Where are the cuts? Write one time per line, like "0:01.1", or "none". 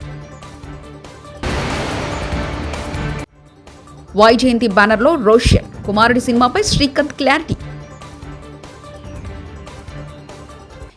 none